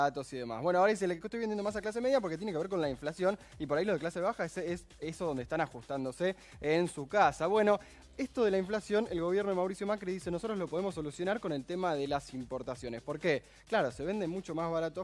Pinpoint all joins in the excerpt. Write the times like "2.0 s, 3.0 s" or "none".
none